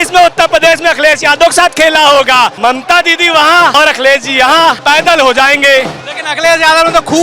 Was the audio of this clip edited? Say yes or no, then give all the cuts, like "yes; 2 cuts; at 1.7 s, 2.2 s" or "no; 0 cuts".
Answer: yes; 3 cuts; at 2.5 s, 3.7 s, 4.8 s